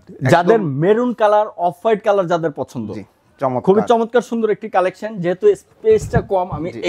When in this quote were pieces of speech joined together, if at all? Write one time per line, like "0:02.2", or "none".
none

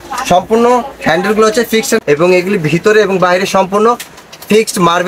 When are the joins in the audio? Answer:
0:02.0

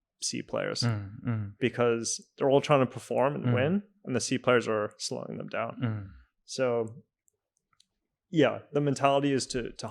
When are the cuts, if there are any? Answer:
none

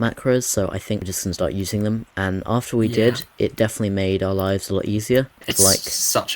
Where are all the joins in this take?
0:01.1
0:05.4

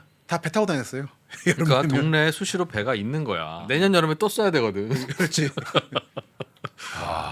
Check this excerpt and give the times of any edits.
0:03.7

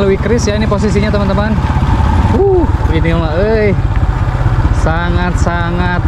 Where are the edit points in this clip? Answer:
0:02.2

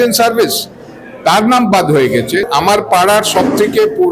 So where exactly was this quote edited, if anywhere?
0:02.5

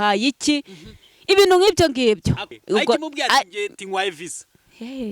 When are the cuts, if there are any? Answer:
0:02.5

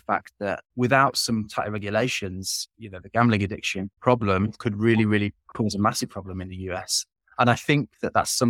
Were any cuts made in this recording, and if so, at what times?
none

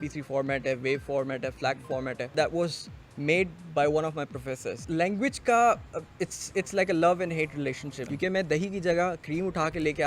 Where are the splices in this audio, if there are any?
0:02.3
0:04.7
0:08.0

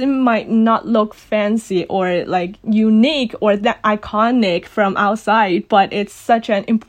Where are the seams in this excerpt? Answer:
none

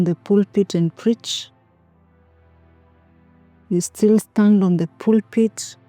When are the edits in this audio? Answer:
0:01.2
0:03.7

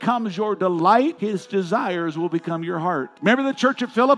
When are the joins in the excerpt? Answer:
0:01.2
0:03.1

